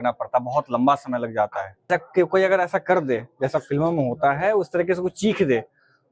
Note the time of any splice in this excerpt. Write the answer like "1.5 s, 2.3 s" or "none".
1.9 s